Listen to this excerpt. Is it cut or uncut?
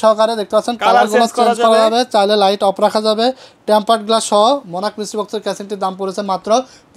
uncut